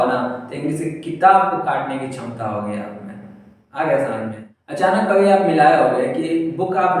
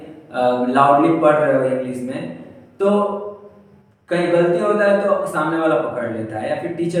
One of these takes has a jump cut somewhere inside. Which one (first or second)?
first